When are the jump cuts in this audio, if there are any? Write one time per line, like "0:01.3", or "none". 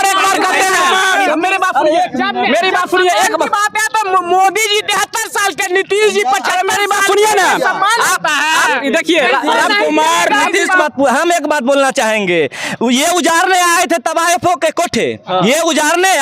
0:10.8